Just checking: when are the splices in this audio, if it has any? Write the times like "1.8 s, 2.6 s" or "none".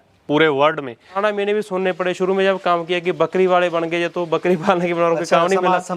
1.2 s